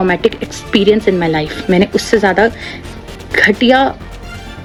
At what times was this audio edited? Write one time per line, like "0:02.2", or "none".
none